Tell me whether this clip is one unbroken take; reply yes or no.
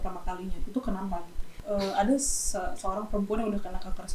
no